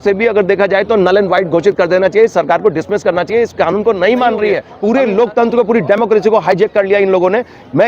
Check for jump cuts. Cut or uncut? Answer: cut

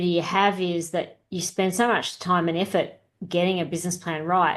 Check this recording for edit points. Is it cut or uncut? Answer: uncut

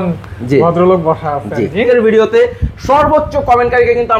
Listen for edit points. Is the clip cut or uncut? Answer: cut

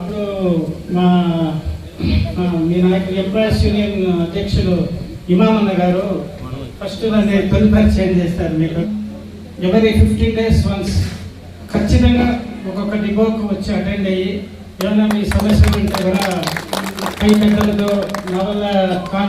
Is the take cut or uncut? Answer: cut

